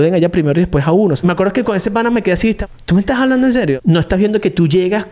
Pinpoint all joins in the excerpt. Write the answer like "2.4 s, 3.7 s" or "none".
1.2 s, 2.6 s, 3.8 s